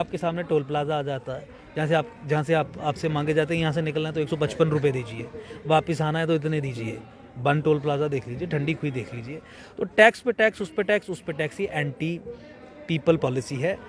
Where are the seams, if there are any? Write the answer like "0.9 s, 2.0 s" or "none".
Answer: none